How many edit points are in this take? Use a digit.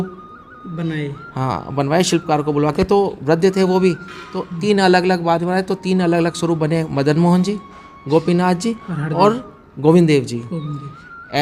0